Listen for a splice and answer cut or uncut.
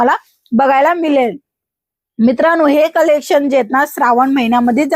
uncut